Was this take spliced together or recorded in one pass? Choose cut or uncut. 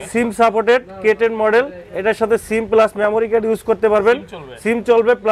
uncut